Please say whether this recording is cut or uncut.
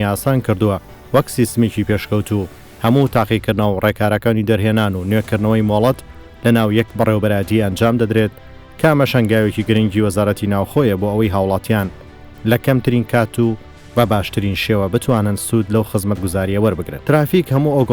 cut